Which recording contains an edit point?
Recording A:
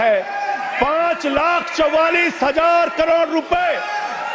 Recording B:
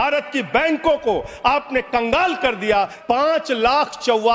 B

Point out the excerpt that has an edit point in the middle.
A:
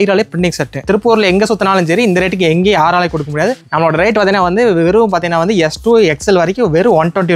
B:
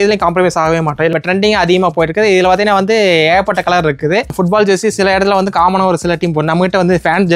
B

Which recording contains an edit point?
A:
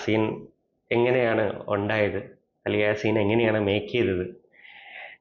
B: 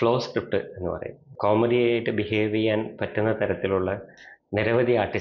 B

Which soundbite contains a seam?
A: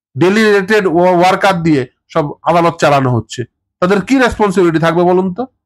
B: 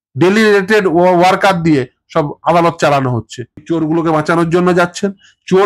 B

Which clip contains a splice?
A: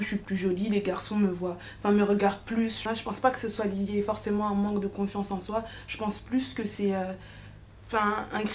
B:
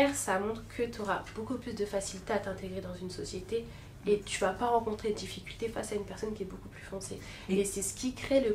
A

